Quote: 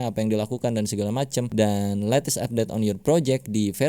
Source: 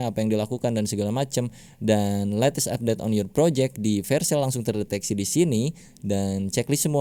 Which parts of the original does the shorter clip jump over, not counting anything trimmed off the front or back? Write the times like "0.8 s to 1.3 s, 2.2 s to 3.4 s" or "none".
1.5 s to 1.8 s